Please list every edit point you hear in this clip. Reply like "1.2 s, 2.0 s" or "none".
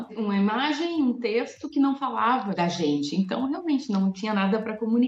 none